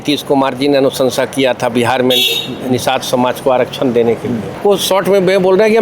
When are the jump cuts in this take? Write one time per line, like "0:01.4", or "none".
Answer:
0:04.6